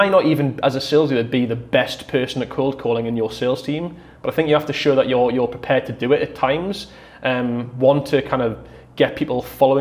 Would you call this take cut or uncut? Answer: uncut